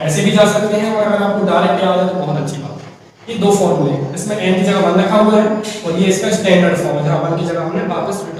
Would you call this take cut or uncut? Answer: uncut